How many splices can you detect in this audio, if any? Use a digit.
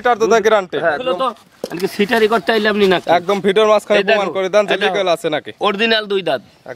1